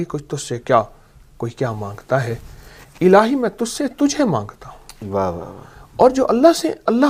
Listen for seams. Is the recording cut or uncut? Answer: uncut